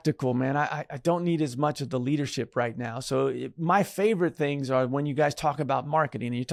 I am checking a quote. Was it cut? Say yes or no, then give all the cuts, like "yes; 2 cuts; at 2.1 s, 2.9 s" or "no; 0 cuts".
no; 0 cuts